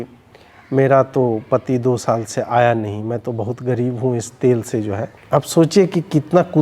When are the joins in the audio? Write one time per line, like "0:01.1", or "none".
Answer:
0:05.1